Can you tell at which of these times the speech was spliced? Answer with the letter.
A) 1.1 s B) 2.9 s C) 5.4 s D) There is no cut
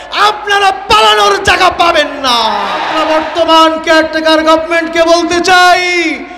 B